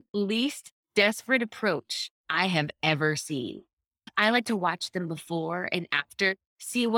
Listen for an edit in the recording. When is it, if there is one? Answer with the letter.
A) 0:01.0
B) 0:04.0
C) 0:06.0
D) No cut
B